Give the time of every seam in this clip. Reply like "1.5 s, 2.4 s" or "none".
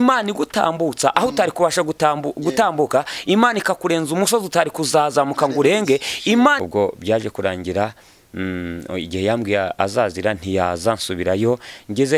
6.6 s